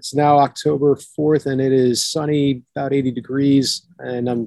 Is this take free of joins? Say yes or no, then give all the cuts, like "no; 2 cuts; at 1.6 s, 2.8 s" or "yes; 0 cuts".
yes; 0 cuts